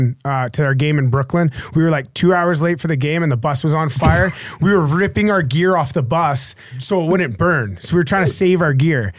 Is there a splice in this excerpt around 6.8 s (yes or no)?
yes